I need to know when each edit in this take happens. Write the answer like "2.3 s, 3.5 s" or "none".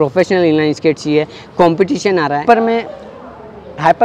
2.4 s

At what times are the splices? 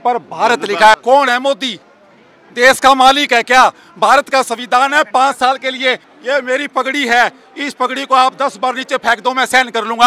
0.9 s, 6.1 s

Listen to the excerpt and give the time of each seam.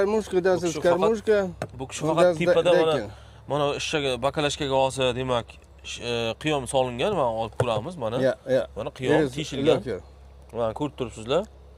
none

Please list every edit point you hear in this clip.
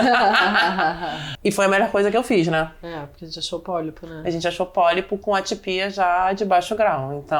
1.3 s

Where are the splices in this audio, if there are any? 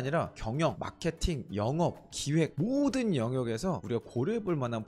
none

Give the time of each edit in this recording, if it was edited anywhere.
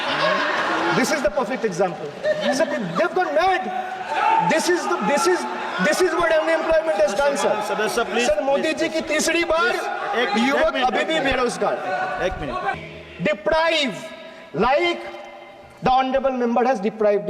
12.8 s

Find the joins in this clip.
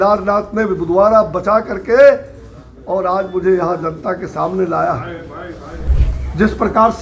5.8 s

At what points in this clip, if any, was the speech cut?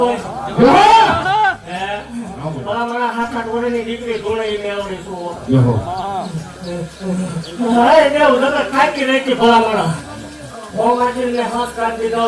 none

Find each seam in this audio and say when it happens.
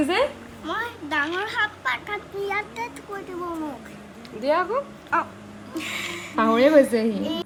none

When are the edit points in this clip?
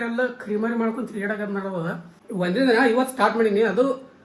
2.1 s

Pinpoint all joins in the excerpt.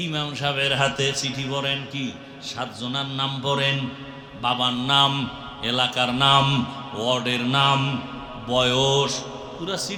none

